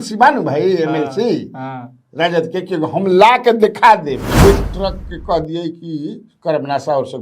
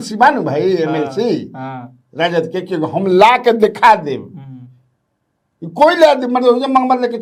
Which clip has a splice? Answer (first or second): first